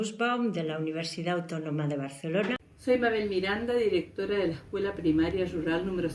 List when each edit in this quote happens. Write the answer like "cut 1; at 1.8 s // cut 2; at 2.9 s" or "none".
cut 1; at 2.7 s